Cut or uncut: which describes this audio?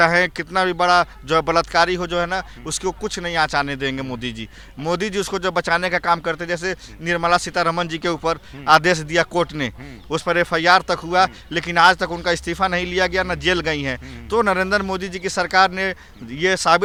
uncut